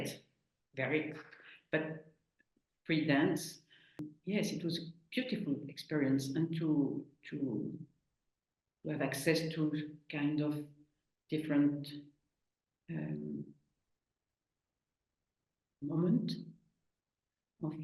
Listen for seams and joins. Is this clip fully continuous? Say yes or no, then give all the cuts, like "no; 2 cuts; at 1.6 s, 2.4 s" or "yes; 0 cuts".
no; 1 cut; at 4.1 s